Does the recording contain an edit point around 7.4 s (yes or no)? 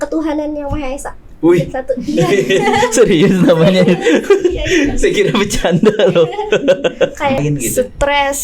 yes